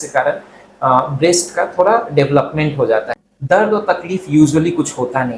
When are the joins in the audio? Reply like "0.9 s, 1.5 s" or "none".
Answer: 3.1 s